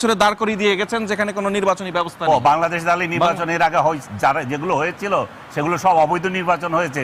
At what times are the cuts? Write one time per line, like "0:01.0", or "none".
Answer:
none